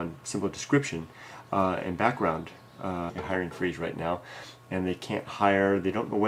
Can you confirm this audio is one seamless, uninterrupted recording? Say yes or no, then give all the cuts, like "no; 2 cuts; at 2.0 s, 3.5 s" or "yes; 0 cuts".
yes; 0 cuts